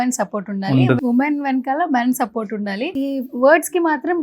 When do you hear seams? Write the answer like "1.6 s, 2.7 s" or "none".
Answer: 1.0 s, 2.9 s